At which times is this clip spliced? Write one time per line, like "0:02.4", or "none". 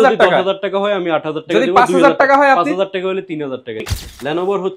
0:03.8